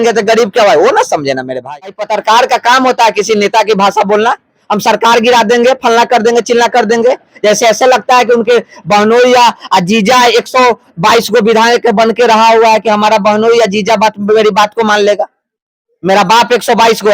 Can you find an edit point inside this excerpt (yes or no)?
yes